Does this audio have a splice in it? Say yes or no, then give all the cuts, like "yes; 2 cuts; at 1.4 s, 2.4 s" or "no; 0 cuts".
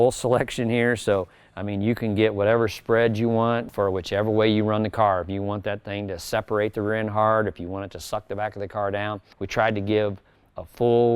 yes; 2 cuts; at 3.7 s, 9.3 s